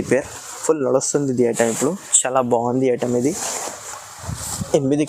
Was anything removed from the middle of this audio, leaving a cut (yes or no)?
no